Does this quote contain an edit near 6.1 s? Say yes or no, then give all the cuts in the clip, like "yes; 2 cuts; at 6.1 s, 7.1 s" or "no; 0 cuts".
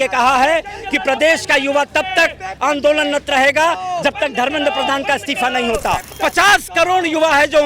yes; 1 cut; at 6.1 s